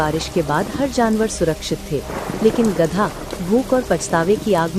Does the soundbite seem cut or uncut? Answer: uncut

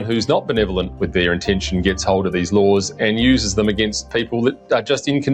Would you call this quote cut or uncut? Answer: uncut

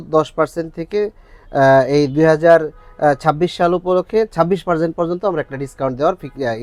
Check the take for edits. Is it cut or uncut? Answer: uncut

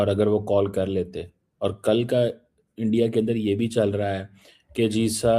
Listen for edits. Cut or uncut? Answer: uncut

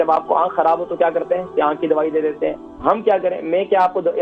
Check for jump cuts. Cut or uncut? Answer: uncut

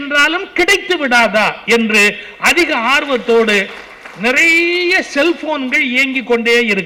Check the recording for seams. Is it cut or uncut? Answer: uncut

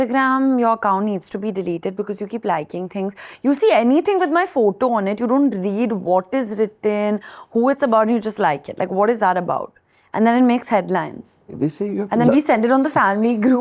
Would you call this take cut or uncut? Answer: uncut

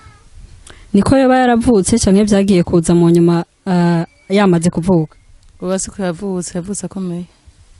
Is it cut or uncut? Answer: uncut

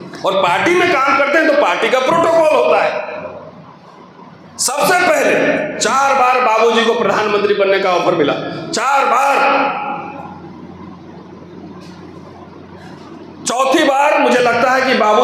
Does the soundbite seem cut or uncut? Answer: uncut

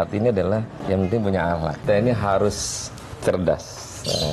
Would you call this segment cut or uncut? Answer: cut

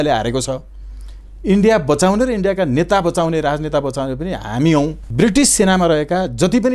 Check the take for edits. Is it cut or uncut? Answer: cut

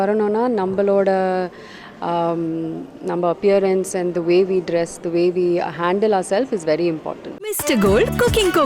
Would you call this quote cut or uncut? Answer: cut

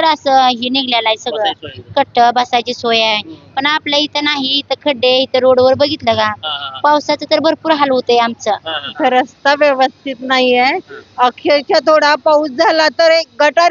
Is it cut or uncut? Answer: cut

